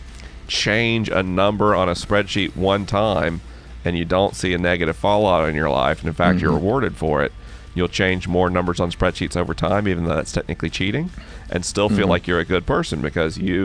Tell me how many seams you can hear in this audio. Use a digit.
0